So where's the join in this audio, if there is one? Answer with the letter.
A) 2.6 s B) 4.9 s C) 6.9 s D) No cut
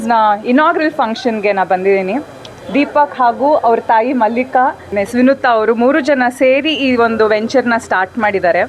B